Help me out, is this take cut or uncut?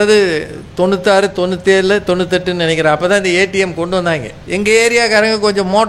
cut